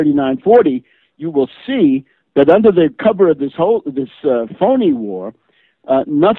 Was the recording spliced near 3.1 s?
no; 1 cut; at 4.5 s

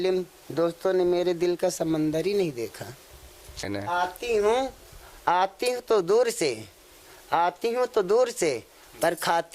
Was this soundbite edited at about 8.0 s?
no; 1 cut; at 3.6 s

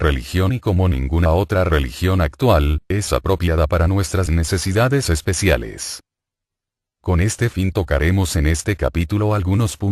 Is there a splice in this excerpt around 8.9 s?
no; 1 cut; at 4.9 s

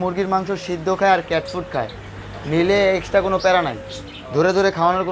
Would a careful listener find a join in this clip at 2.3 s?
no; 0 cuts

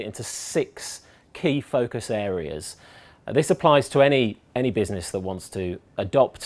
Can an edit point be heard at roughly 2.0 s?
yes; 1 cut; at 2.0 s

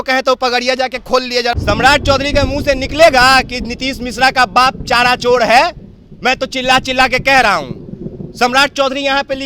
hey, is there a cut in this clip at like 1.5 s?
yes; 1 cut; at 1.5 s

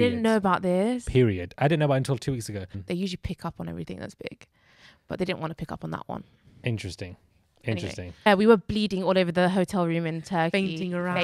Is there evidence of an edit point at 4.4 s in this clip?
no; 2 cuts; at 2.7 s, 8.3 s

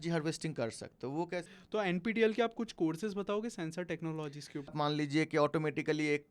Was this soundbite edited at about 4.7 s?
yes; 2 cuts; at 1.6 s, 4.7 s

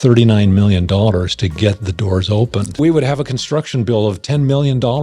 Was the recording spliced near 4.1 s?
no; 1 cut; at 2.8 s

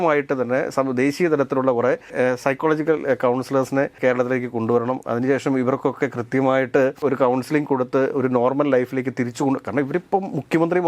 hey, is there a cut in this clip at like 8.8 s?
no; 3 cuts; at 2.1 s, 4.0 s, 7.0 s

